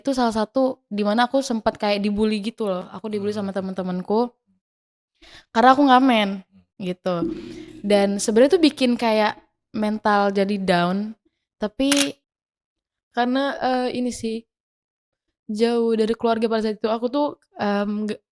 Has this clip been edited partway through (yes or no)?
yes